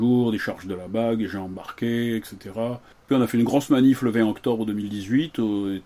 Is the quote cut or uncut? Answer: cut